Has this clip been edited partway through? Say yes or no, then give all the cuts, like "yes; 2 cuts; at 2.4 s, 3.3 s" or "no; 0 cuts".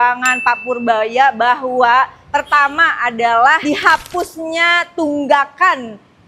no; 0 cuts